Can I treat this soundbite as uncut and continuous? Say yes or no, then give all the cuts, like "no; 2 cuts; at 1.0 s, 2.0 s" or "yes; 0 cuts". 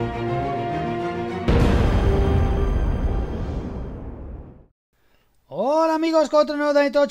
no; 1 cut; at 4.6 s